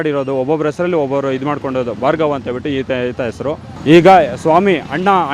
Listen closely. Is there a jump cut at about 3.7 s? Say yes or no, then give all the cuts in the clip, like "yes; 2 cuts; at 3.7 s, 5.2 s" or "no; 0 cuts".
yes; 1 cut; at 3.7 s